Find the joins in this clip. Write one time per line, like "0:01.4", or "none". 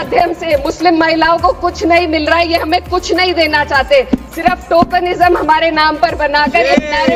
none